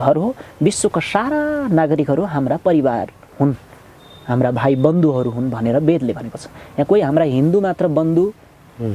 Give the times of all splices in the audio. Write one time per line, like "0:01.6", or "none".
none